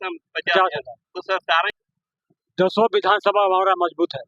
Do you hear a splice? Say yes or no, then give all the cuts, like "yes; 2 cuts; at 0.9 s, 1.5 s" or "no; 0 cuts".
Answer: yes; 1 cut; at 1.7 s